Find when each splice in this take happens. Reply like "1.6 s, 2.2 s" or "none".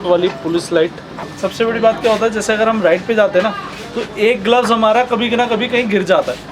1.3 s